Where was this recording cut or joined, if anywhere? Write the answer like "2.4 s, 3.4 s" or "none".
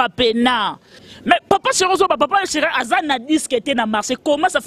1.0 s

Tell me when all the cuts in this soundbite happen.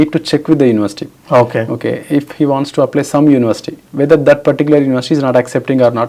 none

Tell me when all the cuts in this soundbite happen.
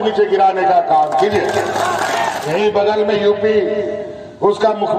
2.4 s

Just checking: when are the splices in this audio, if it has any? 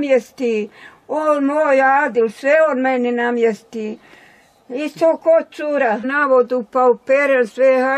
6.1 s

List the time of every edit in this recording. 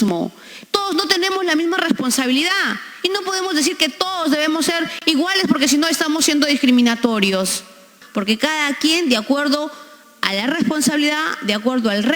8.0 s

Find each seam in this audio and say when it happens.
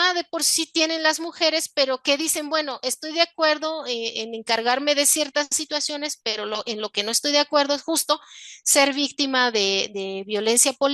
none

